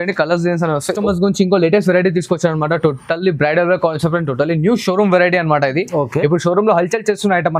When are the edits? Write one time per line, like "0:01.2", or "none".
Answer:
0:01.0